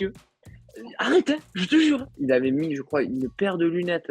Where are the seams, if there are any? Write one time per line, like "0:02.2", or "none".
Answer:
0:02.1